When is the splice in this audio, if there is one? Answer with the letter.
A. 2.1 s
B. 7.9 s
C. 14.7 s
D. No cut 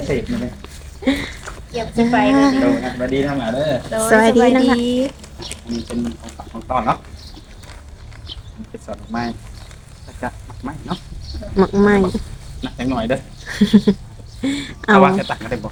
D